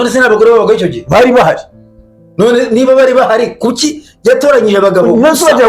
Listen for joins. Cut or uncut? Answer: uncut